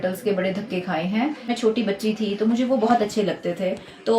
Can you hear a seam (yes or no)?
yes